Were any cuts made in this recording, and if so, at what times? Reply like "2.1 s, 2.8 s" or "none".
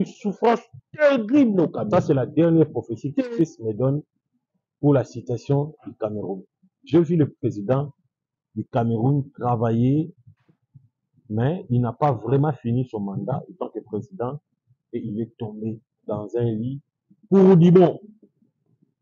1.8 s

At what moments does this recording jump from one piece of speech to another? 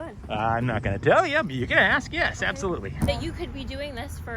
3.1 s

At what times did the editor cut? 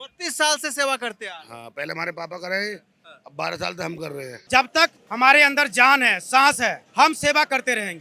4.4 s, 6.8 s

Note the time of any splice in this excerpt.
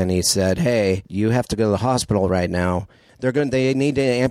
1.1 s, 3.1 s

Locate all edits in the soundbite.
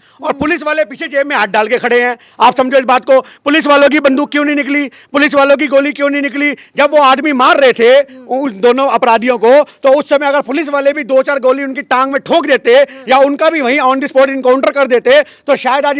none

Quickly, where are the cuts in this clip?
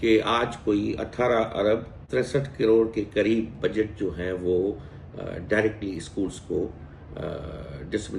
2.0 s

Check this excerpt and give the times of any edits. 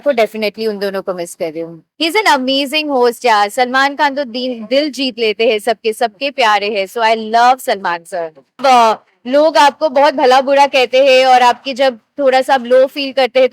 1.9 s, 8.6 s

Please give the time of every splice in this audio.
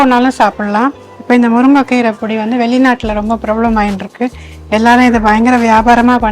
1.1 s

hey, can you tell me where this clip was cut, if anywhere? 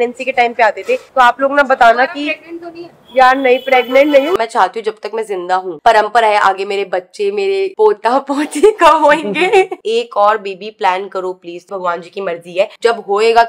4.4 s, 5.8 s, 9.8 s, 11.6 s

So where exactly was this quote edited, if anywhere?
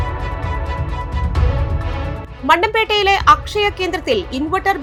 none

